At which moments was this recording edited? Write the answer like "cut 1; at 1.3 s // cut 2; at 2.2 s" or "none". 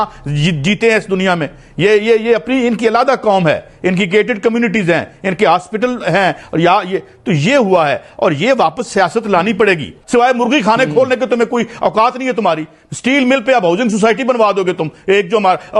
cut 1; at 9.9 s